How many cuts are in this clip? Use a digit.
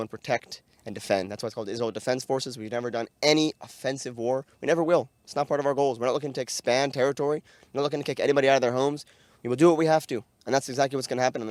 0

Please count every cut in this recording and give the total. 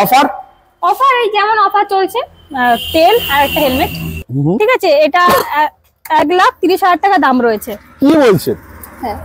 1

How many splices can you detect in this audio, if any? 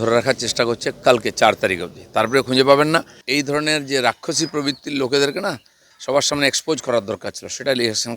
1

